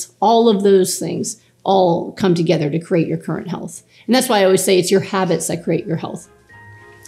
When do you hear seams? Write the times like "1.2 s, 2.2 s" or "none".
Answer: none